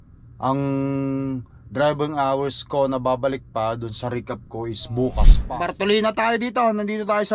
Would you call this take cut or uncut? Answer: cut